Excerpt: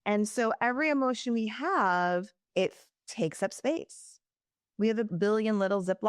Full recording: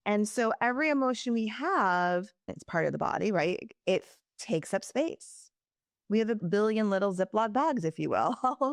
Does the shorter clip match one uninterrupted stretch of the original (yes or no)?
no